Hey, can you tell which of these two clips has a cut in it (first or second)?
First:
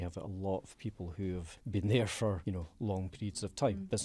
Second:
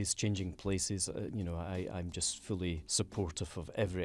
first